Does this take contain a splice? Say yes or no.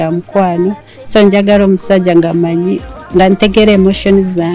yes